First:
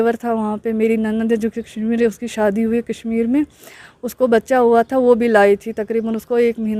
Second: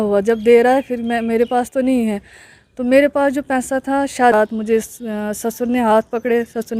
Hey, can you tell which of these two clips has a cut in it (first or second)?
second